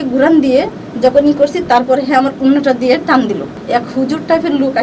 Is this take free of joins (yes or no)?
no